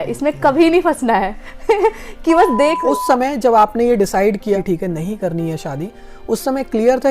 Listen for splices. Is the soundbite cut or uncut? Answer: cut